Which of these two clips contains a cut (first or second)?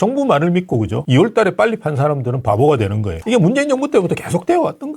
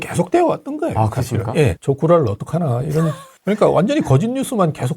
second